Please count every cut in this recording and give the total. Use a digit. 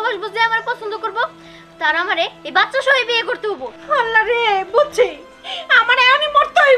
0